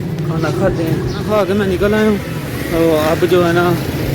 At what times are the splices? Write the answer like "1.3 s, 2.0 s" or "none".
1.2 s